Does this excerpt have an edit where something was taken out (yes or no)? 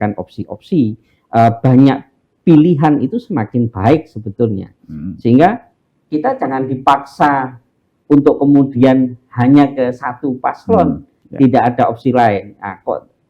no